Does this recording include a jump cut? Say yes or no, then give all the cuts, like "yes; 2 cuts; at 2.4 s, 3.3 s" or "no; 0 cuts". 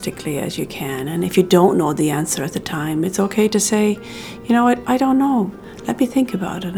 yes; 1 cut; at 5.7 s